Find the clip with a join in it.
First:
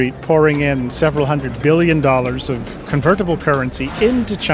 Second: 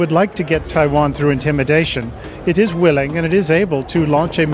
first; 1 cut; at 2.8 s

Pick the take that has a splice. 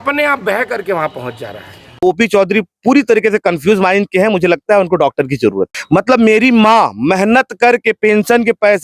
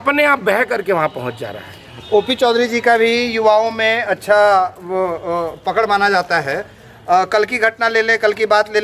first; 2 cuts; at 2.0 s, 5.7 s

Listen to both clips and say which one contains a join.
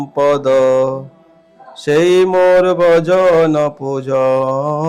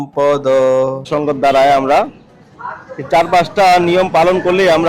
second; 1 cut; at 1.1 s

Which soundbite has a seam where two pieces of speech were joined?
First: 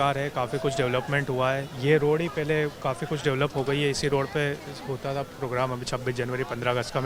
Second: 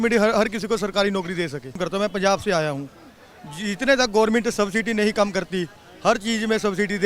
second; 1 cut; at 1.8 s

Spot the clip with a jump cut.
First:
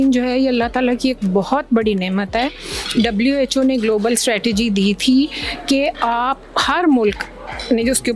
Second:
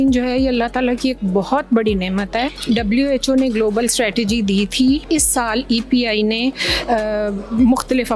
second; 2 cuts; at 2.6 s, 5.0 s

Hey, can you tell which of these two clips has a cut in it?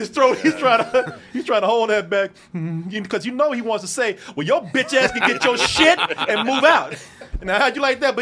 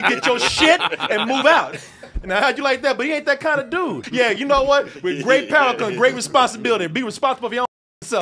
second; 1 cut; at 4.0 s

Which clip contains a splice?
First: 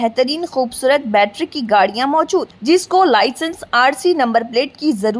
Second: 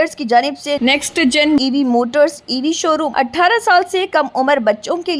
second; 1 cut; at 3.1 s

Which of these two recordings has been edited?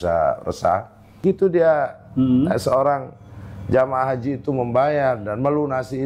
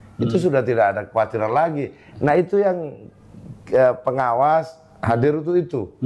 first; 1 cut; at 1.2 s

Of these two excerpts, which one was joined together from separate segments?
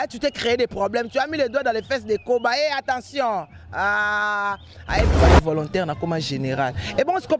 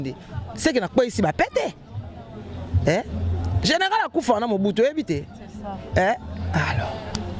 first; 1 cut; at 5.1 s

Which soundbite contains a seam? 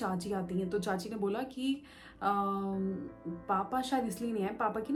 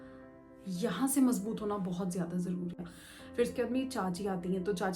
second; 1 cut; at 2.9 s

